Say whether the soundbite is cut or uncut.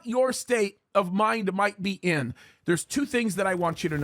uncut